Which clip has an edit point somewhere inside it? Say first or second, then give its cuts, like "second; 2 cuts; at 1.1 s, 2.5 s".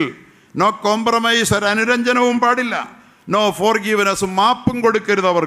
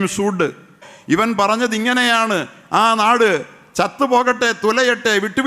second; 1 cut; at 0.9 s